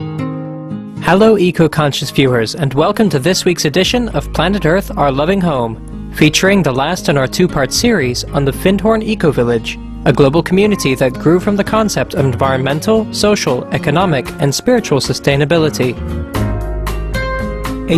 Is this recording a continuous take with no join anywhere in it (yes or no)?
yes